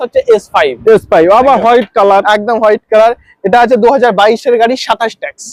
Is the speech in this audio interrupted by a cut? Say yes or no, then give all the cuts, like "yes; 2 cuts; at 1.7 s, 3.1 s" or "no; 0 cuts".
no; 0 cuts